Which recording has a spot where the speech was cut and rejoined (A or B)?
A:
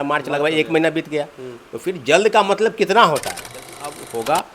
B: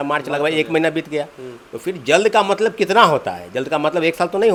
A